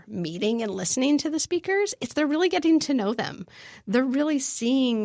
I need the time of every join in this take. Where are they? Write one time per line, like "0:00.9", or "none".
none

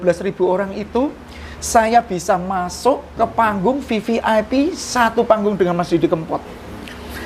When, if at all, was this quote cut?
none

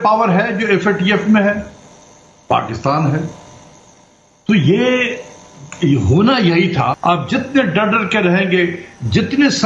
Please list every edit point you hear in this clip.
0:07.0

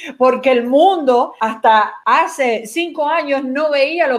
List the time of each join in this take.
0:01.8

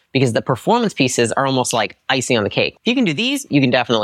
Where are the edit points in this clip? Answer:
0:02.7

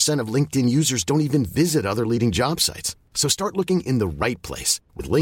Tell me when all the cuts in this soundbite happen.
none

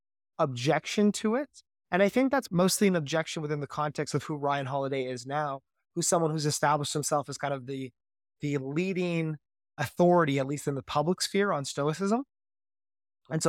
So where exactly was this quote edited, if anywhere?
0:02.5

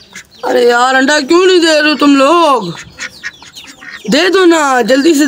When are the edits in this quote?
none

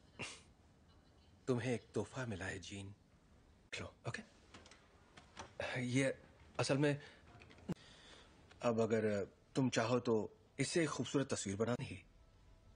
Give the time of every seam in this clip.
none

